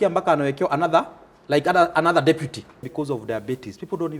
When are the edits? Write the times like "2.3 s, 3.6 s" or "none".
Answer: 2.9 s